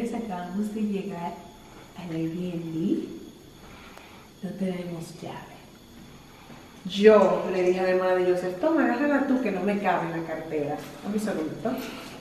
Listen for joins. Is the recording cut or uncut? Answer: uncut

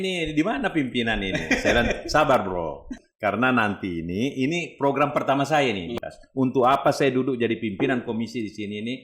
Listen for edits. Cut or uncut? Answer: cut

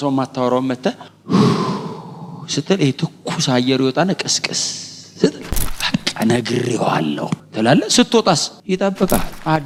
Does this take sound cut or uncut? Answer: uncut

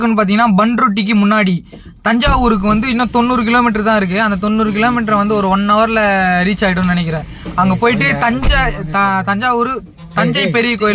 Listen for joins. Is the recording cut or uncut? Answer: uncut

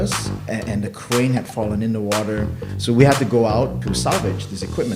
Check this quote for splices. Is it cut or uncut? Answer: cut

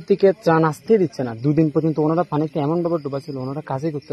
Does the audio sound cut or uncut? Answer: uncut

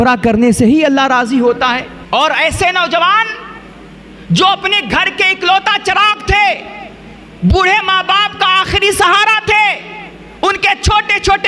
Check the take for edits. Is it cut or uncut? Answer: cut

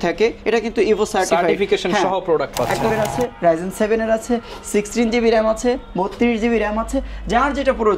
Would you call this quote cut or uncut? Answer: cut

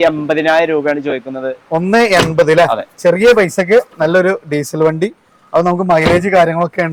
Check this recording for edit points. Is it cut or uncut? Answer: uncut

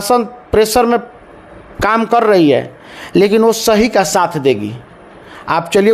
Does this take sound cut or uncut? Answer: uncut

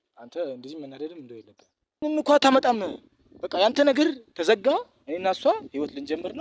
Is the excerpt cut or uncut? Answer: cut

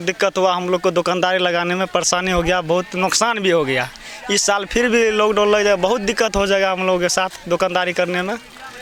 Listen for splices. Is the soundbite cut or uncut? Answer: uncut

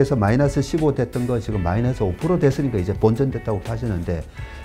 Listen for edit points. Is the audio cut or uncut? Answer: cut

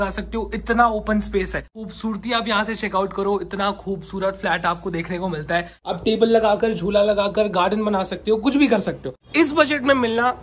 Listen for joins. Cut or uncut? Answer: cut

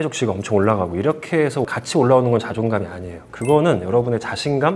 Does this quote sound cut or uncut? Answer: uncut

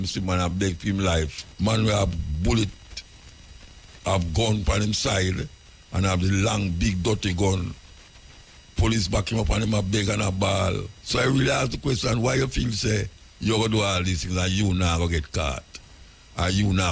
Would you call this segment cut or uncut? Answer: cut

